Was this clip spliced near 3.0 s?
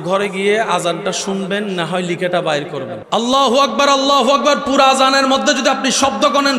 yes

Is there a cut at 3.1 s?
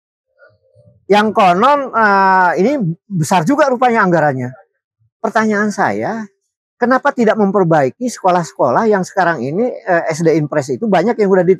no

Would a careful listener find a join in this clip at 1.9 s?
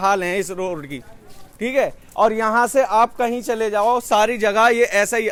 no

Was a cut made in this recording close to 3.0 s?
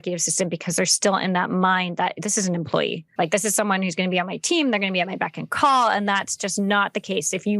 yes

